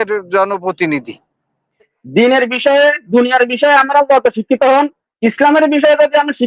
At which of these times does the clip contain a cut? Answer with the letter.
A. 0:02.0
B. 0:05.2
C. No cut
A